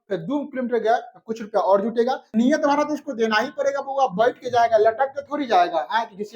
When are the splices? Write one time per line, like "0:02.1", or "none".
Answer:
0:02.3